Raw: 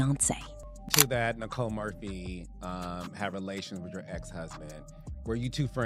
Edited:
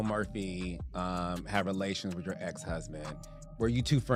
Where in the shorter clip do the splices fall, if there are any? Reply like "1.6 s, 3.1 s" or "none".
none